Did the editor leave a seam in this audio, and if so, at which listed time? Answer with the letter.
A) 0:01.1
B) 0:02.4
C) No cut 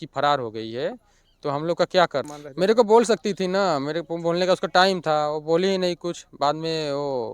B